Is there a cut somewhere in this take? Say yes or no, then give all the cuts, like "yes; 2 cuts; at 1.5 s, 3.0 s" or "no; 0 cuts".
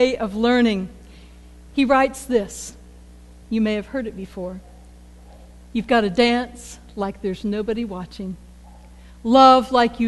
yes; 1 cut; at 2.5 s